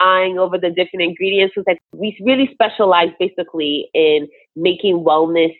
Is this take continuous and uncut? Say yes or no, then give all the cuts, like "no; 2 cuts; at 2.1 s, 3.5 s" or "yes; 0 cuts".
no; 1 cut; at 1.8 s